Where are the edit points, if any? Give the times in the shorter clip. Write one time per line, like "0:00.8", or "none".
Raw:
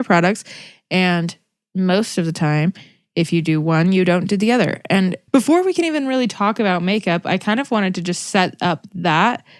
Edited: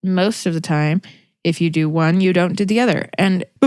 none